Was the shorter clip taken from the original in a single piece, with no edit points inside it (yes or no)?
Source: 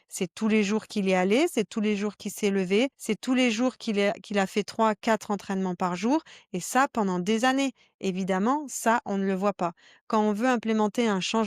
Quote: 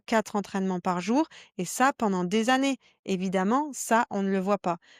yes